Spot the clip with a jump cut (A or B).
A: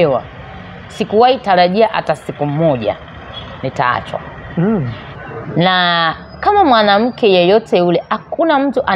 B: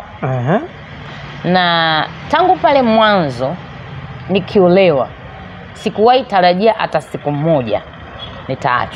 A